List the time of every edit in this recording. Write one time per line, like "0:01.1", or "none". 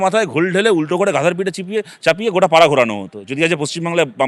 none